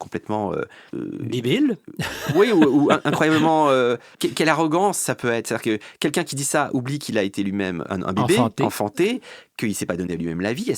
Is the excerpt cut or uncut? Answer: cut